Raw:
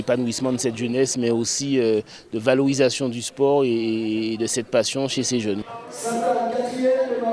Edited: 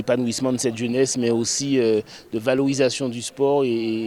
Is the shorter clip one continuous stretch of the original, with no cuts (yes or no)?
yes